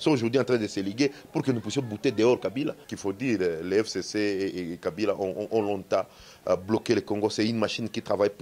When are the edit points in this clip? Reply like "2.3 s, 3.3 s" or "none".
2.9 s